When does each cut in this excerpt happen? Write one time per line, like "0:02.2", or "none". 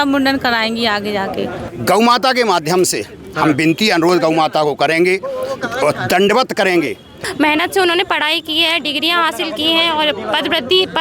0:01.6
0:07.1